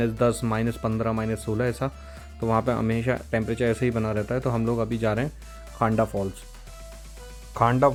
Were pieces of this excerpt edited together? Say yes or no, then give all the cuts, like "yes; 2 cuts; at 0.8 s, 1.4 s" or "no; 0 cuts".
no; 0 cuts